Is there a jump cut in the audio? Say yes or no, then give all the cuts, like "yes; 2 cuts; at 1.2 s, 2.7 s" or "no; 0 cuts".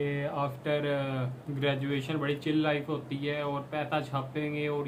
no; 0 cuts